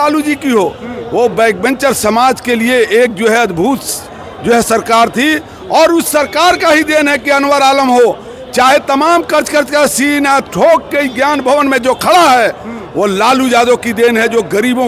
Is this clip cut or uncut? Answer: uncut